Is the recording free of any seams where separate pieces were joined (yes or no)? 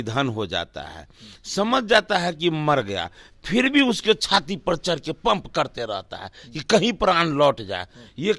yes